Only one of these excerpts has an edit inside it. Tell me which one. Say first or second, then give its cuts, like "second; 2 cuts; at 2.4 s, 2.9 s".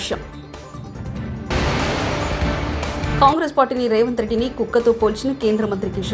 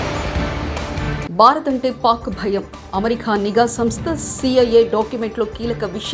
second; 1 cut; at 1.3 s